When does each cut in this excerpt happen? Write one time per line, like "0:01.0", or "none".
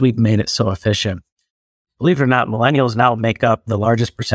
0:01.7